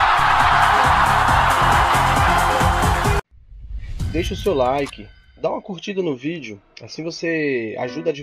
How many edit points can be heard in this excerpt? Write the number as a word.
one